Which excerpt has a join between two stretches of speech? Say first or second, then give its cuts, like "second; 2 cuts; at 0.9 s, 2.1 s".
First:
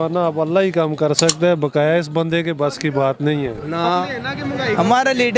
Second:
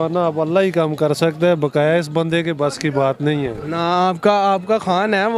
first; 1 cut; at 4.0 s